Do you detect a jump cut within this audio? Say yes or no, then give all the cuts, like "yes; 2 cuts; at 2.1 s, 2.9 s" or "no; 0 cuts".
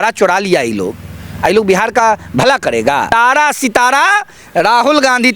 yes; 1 cut; at 3.1 s